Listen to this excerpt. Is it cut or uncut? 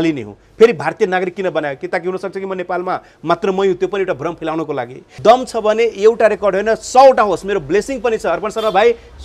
cut